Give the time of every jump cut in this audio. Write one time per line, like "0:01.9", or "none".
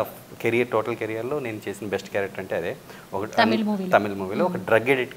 none

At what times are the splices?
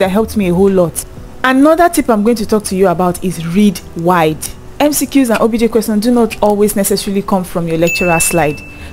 none

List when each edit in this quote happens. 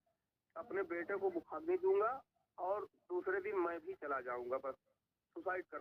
none

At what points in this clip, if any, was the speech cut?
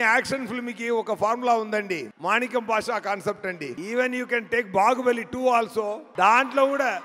0:02.1
0:03.7
0:06.0

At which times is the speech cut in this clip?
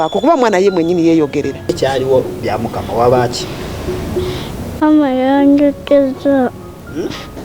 0:01.7

